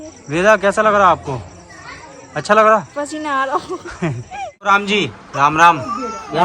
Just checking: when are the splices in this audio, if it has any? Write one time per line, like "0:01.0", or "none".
0:04.7

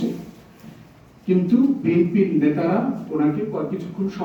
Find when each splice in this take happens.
none

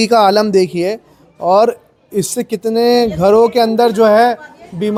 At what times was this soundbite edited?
none

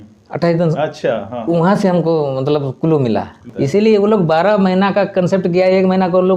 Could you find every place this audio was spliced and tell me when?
0:03.4

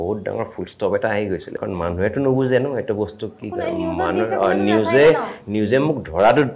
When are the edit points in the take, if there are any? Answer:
0:01.6

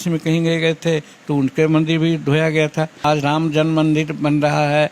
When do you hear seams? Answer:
0:03.0

